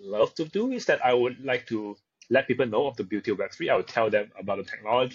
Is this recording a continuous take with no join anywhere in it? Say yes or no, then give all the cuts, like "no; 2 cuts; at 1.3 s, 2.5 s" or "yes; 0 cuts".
yes; 0 cuts